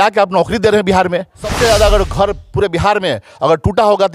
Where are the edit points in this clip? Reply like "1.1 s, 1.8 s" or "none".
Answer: 1.4 s